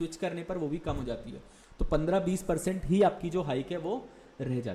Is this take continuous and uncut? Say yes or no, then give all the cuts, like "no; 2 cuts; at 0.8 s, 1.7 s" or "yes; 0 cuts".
yes; 0 cuts